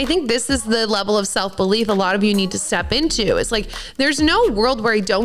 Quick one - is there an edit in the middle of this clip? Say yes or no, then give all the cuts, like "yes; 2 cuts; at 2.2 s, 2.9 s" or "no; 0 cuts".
no; 0 cuts